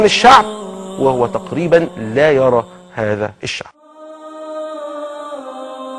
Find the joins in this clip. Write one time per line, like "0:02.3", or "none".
0:04.2